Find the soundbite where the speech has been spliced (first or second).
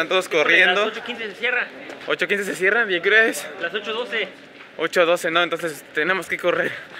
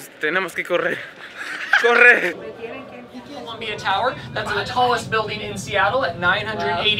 second